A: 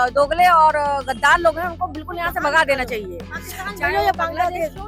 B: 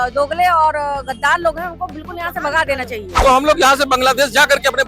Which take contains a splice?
B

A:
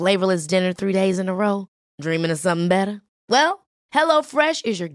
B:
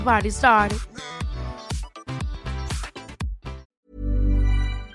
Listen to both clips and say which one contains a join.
B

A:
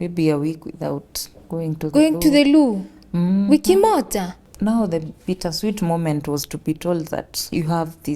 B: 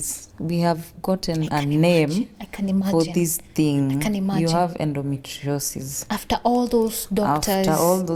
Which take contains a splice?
A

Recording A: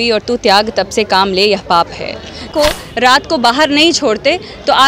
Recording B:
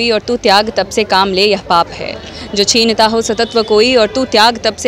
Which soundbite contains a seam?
A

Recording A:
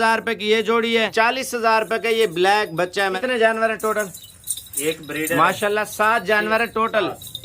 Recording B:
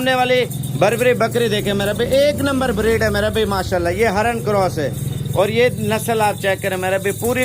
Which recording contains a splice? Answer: A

